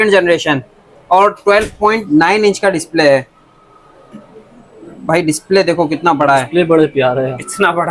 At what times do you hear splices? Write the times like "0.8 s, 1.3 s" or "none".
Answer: none

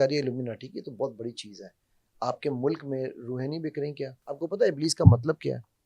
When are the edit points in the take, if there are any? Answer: 4.2 s

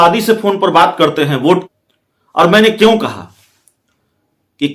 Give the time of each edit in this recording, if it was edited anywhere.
1.7 s

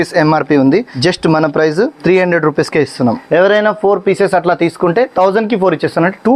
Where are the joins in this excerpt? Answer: 0.9 s, 2.0 s, 3.2 s, 5.1 s

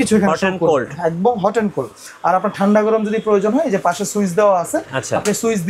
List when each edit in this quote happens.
none

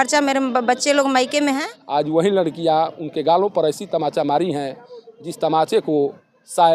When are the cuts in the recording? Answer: 1.7 s

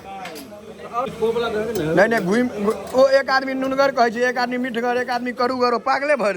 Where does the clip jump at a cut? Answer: 1.1 s

